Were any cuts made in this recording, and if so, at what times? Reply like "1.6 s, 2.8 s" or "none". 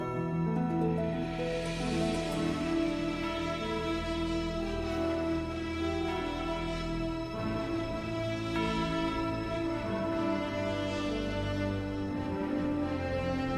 9.6 s